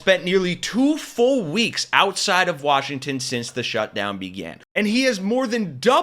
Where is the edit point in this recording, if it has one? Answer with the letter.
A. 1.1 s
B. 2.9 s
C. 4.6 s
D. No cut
C